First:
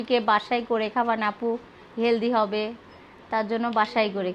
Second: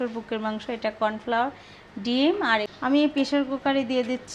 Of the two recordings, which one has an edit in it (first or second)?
second